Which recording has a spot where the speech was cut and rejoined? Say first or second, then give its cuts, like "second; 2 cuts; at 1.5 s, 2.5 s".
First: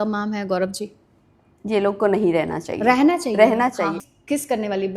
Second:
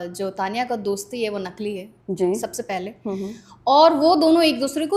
first; 1 cut; at 4.1 s